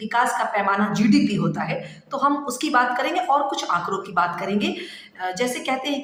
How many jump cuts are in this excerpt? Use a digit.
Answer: 0